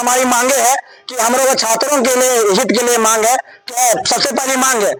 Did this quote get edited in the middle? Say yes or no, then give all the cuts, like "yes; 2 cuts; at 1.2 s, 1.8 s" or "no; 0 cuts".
no; 0 cuts